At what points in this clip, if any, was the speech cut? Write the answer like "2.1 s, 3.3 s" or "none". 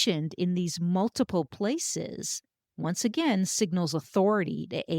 none